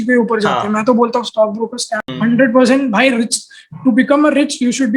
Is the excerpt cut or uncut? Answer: cut